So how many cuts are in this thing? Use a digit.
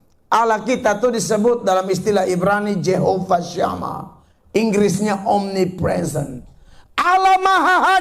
0